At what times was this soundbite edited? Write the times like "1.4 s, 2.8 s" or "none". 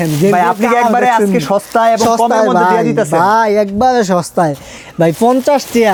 none